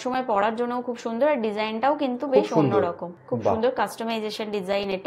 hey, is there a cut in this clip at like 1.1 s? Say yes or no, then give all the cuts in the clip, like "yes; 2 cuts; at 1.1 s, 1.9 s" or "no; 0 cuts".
no; 1 cut; at 3.1 s